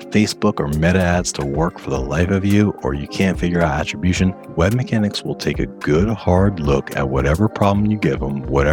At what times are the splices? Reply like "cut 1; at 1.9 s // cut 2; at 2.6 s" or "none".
none